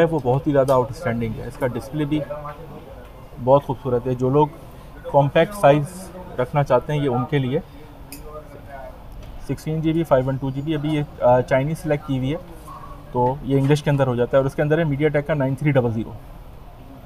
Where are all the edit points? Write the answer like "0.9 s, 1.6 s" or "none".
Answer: none